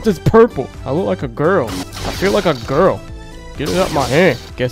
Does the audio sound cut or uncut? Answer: uncut